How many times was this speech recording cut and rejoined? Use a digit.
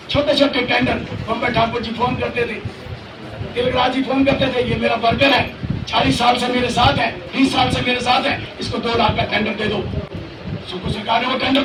0